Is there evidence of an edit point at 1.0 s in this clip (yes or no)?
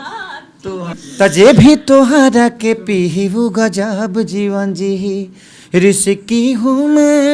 yes